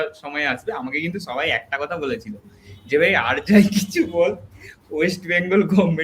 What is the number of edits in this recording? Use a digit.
0